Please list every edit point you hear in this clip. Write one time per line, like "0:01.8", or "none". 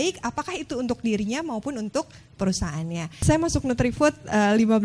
0:03.1